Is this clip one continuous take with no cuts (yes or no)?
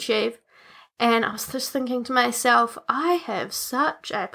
yes